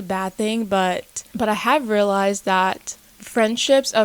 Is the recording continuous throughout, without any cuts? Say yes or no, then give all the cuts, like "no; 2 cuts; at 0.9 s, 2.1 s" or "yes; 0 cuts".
yes; 0 cuts